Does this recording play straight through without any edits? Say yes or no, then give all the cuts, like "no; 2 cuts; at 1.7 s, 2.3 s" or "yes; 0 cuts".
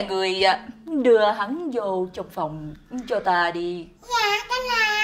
yes; 0 cuts